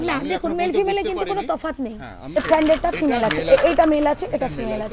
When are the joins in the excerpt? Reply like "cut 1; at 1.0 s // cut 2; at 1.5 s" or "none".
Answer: cut 1; at 2.4 s